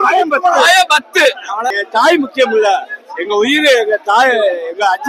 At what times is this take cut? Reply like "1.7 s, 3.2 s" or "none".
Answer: 1.7 s